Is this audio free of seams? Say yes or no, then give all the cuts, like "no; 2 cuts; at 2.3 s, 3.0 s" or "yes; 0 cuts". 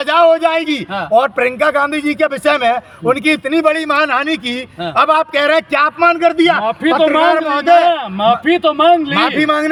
yes; 0 cuts